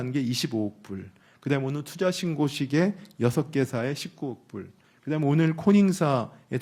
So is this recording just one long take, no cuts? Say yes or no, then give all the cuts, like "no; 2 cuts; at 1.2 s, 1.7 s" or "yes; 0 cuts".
yes; 0 cuts